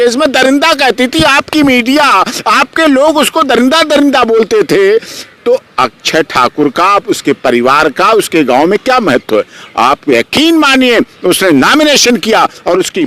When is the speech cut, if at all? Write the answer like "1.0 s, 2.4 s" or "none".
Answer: none

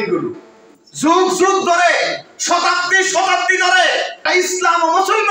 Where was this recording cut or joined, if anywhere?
4.2 s

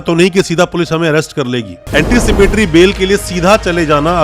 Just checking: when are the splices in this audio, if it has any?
1.7 s

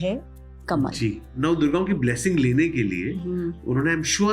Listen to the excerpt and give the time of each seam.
1.3 s

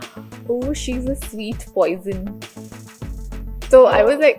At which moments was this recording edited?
none

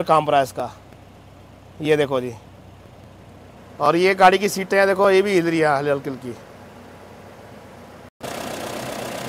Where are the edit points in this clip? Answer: none

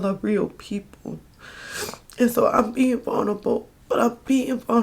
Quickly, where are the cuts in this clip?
3.7 s

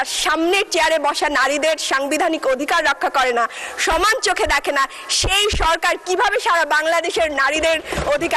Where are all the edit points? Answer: none

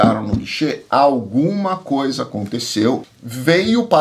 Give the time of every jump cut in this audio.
3.1 s

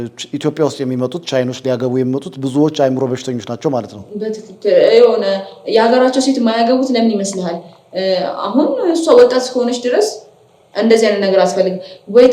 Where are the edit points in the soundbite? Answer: none

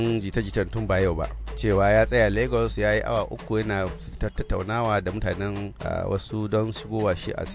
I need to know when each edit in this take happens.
none

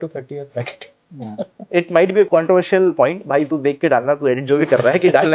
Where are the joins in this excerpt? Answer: 1.5 s

